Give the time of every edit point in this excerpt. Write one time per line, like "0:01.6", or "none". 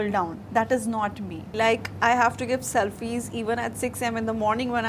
0:01.5